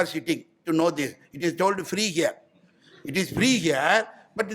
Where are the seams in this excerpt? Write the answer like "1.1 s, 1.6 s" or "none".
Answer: none